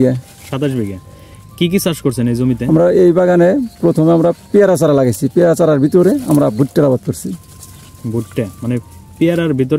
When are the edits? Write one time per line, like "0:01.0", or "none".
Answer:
none